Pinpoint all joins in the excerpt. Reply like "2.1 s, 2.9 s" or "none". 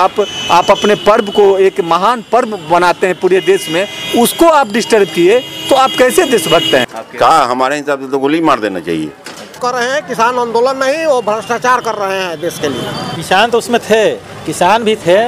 7.0 s, 9.6 s, 13.1 s